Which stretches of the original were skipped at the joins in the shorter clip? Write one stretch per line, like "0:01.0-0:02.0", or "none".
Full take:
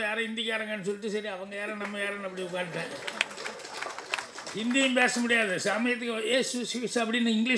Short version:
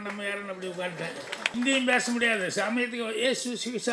0:03.3-0:04.6